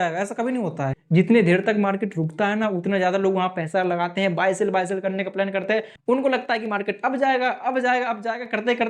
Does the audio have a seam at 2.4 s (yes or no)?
no